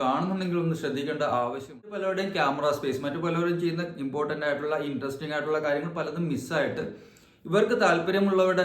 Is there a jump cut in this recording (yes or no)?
yes